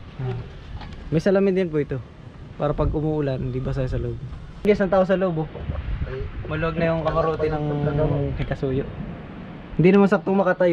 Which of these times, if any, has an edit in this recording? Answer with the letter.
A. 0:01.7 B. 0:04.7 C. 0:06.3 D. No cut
B